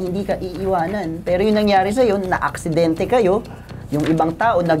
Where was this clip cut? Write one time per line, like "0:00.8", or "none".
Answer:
none